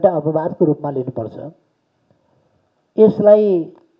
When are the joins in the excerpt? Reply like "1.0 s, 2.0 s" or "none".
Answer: none